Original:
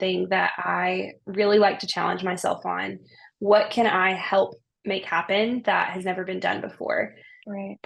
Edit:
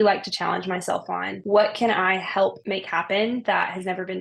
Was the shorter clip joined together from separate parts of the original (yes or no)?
yes